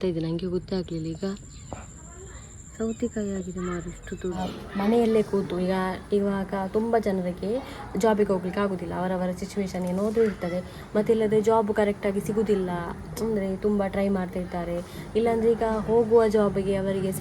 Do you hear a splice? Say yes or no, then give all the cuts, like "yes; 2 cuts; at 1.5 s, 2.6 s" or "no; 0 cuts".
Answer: yes; 1 cut; at 4.4 s